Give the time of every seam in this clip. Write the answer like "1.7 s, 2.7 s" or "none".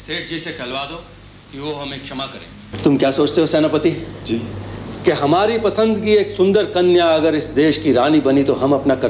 2.7 s

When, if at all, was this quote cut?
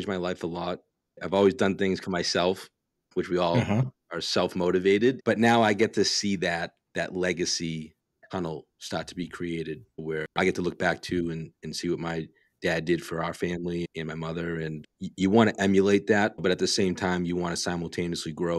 1.0 s, 5.2 s

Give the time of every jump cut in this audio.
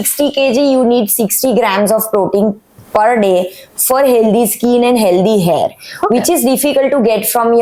none

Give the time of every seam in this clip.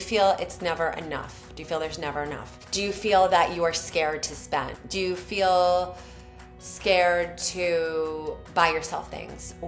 2.6 s, 4.8 s

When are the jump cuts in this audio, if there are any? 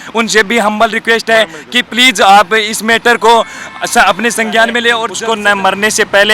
5.1 s

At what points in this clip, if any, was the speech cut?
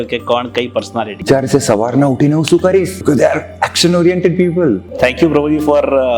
1.2 s, 3.0 s, 4.9 s

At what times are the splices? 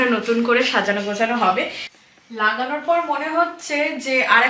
1.9 s

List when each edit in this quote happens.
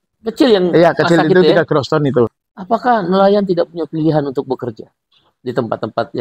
2.4 s

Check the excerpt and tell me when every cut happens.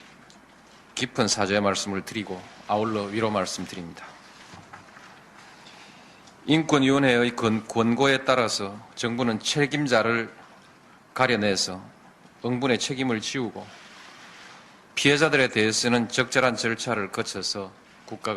16.8 s

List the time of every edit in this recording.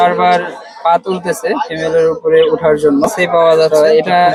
none

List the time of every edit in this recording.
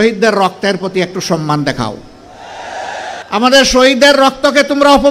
3.2 s

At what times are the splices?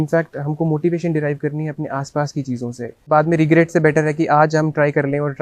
3.1 s

